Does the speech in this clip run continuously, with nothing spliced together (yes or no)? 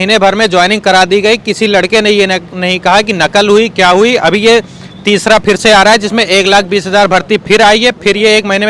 yes